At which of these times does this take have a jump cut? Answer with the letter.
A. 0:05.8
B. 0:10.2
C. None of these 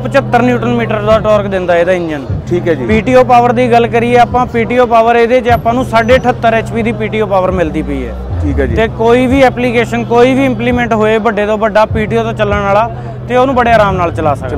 C